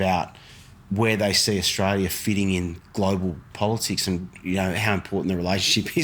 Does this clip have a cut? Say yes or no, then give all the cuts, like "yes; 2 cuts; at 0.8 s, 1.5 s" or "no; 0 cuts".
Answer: no; 0 cuts